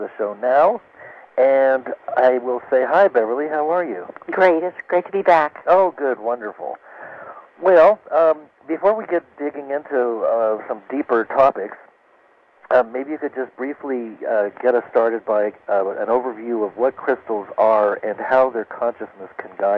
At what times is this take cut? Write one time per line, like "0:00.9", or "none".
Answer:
none